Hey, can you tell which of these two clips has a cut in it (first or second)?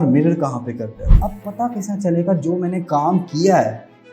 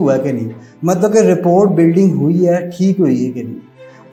first